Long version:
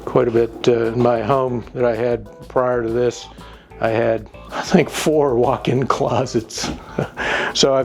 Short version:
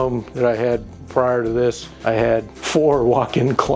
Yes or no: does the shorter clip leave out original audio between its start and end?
yes